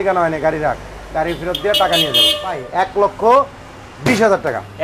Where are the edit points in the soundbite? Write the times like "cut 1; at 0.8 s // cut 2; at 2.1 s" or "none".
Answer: cut 1; at 2.6 s